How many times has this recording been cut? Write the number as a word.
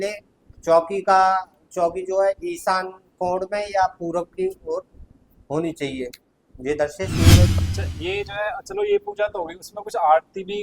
one